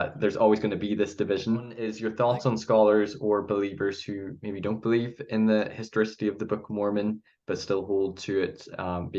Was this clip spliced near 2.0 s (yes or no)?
yes